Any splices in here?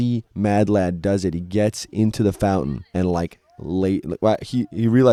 no; 0 cuts

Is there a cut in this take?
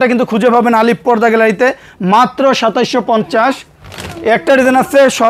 no; 0 cuts

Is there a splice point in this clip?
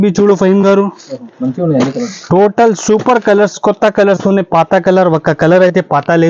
no; 0 cuts

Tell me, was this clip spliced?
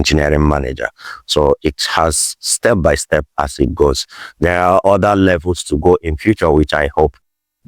no; 0 cuts

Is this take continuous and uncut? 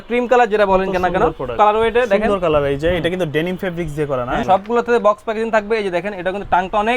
no; 2 cuts; at 1.5 s, 4.4 s

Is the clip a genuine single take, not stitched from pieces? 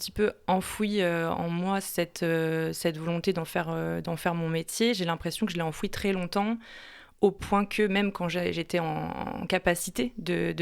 yes; 0 cuts

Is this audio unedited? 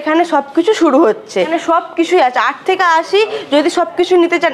no; 1 cut; at 1.5 s

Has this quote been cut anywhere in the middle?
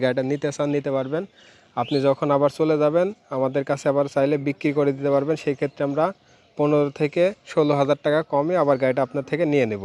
no; 0 cuts

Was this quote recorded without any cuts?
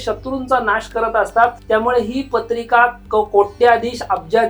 no; 1 cut; at 1.6 s

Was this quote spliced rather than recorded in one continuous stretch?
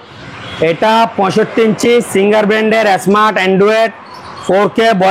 no; 0 cuts

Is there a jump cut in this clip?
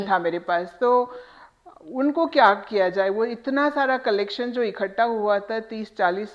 no; 0 cuts

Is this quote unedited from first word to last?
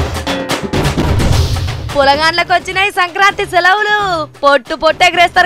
no; 1 cut; at 1.7 s

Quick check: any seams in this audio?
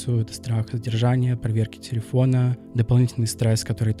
no; 0 cuts

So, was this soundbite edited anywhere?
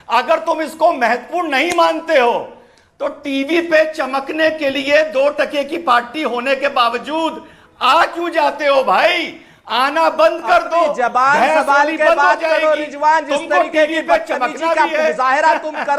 no; 0 cuts

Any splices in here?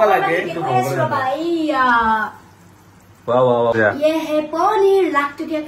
yes; 1 cut; at 3.7 s

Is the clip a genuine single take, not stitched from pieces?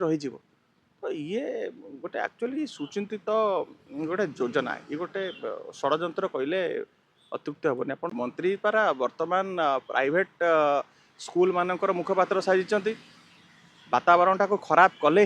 no; 1 cut; at 8.1 s

